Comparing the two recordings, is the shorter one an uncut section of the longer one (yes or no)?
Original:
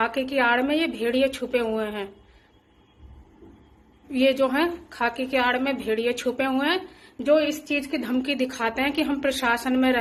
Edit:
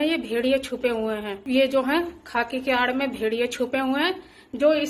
no